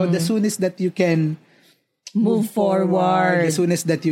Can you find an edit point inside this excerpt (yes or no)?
no